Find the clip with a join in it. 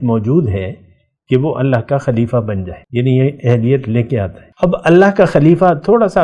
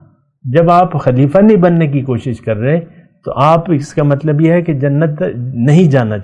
first; 2 cuts; at 2.7 s, 4.4 s

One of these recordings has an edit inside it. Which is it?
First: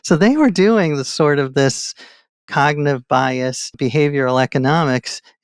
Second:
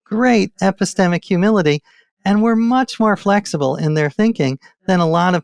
first; 1 cut; at 3.8 s

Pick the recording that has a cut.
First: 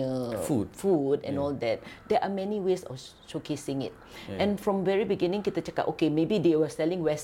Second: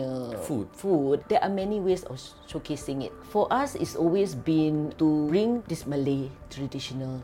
second; 3 cuts; at 1.2 s, 3.2 s, 5.6 s

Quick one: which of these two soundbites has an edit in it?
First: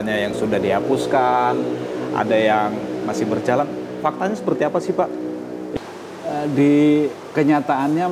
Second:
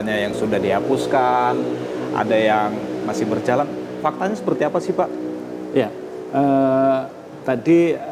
first; 1 cut; at 5.7 s

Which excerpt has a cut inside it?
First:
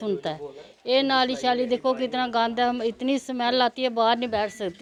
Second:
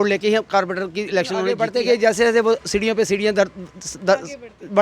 second; 1 cut; at 1.7 s

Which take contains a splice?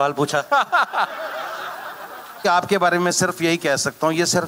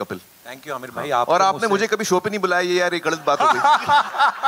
first; 1 cut; at 2.4 s

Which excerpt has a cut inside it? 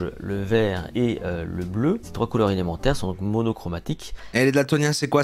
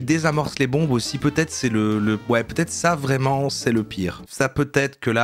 first; 3 cuts; at 0.8 s, 2.1 s, 4.3 s

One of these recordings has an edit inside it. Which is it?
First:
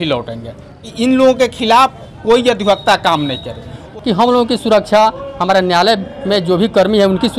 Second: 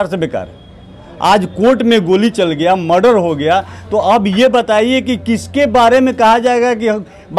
first; 2 cuts; at 0.8 s, 3.8 s

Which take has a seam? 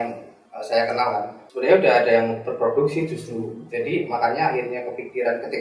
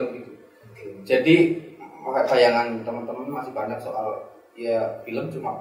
first; 1 cut; at 1.4 s

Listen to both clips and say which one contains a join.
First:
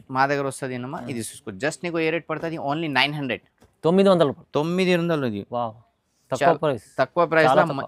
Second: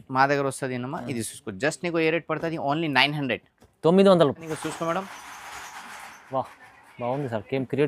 second; 1 cut; at 4.4 s

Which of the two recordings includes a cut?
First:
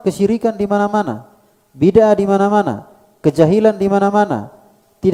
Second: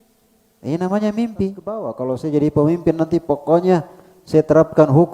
second; 1 cut; at 1.9 s

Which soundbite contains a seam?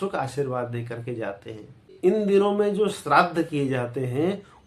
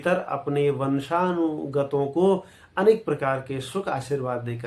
first; 1 cut; at 1.9 s

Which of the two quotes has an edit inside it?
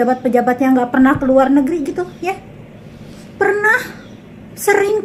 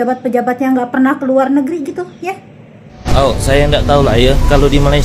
second; 1 cut; at 3.1 s

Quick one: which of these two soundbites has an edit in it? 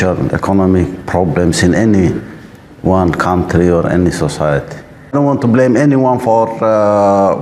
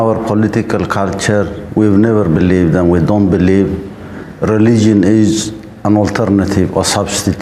first; 1 cut; at 5.1 s

